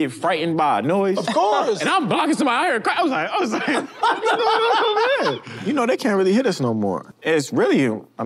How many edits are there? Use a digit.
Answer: 2